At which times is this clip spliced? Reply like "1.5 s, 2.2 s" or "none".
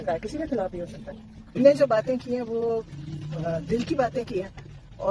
1.6 s